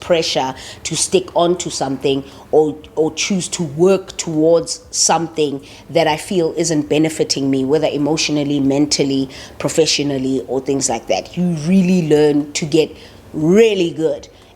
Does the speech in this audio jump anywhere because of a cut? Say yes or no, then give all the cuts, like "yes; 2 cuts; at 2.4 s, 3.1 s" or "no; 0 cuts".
no; 0 cuts